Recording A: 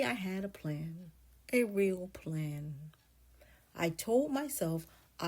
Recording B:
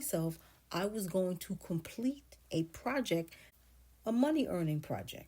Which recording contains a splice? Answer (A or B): B